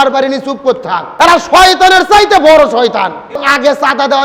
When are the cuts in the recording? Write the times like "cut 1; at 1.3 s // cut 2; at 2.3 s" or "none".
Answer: cut 1; at 1.1 s // cut 2; at 3.4 s